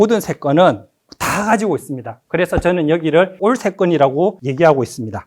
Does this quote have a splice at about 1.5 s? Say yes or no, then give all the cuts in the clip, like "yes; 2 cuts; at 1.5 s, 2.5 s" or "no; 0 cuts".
no; 2 cuts; at 3.4 s, 4.4 s